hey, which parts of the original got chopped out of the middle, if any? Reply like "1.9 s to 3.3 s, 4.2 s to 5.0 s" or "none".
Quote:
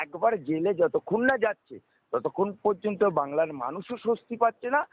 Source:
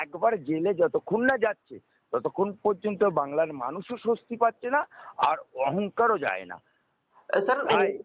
none